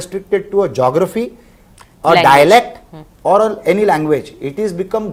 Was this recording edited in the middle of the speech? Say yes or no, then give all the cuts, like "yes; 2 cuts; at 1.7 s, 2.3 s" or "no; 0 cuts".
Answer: no; 0 cuts